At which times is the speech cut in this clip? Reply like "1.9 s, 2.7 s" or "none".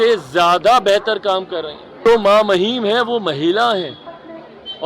1.8 s